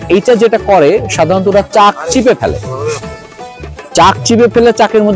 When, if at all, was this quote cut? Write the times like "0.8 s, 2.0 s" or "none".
none